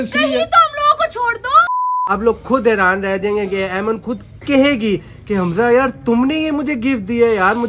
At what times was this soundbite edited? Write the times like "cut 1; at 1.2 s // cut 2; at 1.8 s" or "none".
cut 1; at 1.8 s